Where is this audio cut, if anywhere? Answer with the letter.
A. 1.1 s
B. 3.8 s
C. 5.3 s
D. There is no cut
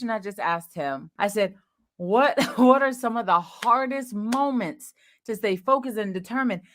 A